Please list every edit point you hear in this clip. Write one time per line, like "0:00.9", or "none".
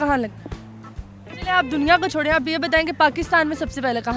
none